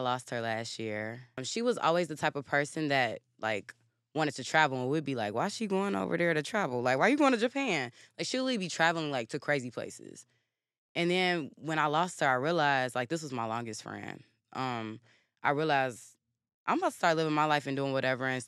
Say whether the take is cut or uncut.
cut